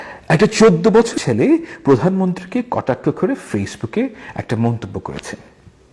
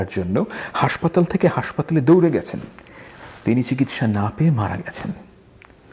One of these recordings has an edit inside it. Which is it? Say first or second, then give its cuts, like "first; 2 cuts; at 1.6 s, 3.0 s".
first; 1 cut; at 1.2 s